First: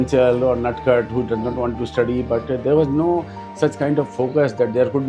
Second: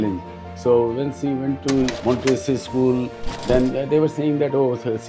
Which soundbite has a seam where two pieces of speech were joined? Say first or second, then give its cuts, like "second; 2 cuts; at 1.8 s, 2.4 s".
second; 1 cut; at 2.0 s